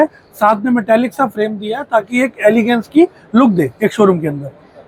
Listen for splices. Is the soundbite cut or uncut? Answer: uncut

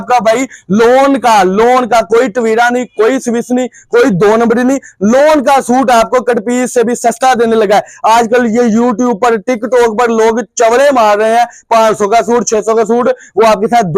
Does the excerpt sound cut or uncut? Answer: uncut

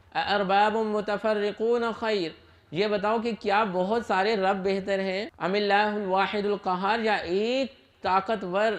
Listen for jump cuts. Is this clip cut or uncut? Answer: cut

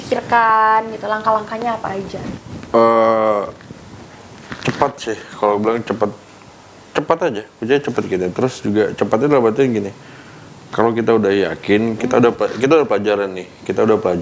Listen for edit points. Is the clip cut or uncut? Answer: uncut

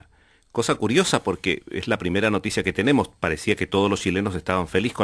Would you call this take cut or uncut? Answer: cut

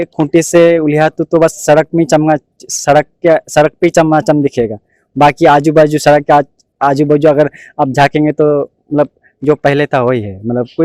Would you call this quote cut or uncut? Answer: uncut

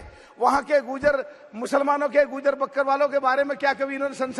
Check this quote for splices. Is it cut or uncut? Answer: uncut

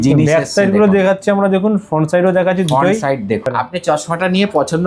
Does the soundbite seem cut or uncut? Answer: cut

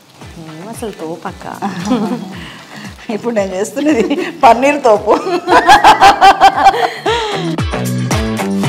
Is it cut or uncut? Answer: cut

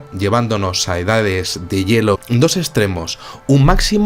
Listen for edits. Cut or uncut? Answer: uncut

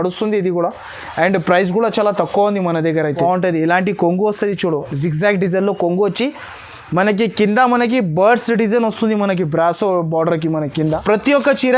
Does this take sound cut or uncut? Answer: cut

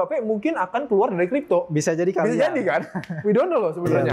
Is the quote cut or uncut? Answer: uncut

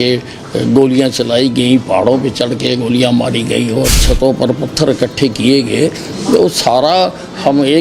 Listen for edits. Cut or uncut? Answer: cut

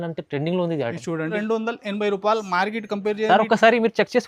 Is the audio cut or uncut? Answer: cut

